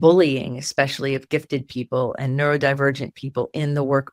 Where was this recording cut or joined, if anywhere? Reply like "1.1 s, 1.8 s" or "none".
none